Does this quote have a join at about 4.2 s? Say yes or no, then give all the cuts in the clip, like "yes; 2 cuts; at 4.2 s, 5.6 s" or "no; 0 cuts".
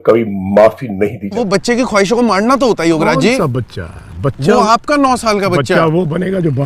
no; 1 cut; at 1.4 s